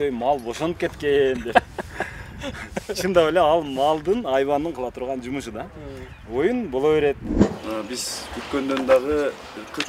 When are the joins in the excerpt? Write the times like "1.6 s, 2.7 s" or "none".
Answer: 7.3 s